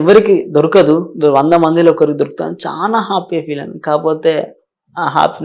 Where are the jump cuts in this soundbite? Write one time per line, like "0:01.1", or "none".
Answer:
none